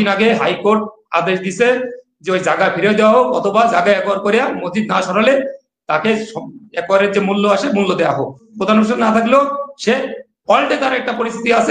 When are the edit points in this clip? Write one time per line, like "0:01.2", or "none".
0:08.5

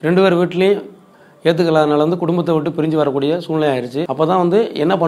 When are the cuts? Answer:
0:04.0

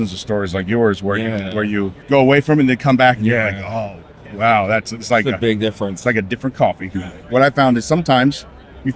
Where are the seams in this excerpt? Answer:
0:02.0
0:07.0

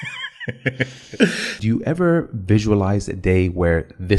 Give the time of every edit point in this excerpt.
0:01.6

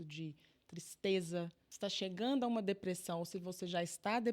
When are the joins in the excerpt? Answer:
0:01.6

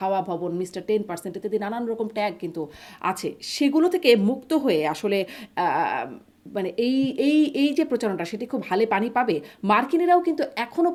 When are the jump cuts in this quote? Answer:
none

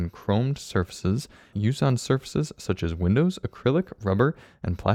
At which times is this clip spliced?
0:01.5

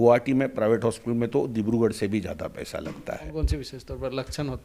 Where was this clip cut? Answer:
0:03.3

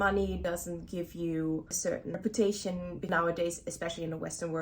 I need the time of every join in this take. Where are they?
0:02.2
0:03.1

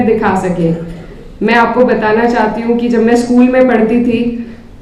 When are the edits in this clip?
none

